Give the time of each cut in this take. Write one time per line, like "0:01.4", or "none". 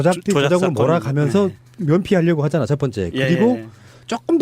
0:03.1